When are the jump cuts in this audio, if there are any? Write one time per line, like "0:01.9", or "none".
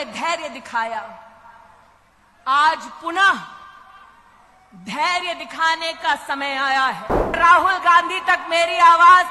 0:07.4